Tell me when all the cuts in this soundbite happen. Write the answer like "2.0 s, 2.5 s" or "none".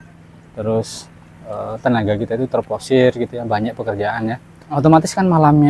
4.8 s

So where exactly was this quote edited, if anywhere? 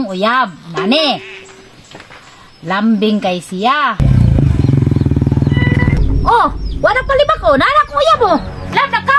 4.0 s, 6.0 s

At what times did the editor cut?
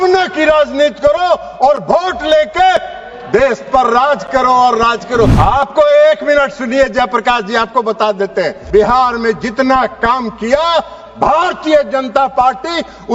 5.3 s, 8.6 s

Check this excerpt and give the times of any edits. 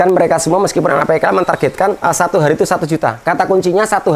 2.0 s, 3.2 s

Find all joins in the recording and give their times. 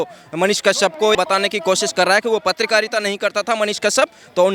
1.2 s

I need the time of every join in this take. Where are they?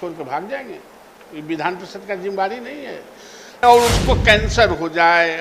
3.4 s

